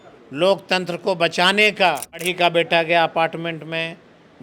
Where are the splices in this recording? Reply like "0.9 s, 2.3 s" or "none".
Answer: 2.3 s